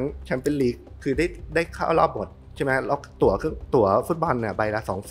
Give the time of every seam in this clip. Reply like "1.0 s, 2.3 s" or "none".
none